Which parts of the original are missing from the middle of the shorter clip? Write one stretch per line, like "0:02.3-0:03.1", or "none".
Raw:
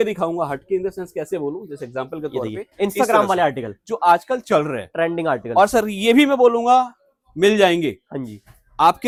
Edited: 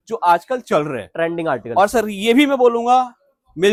none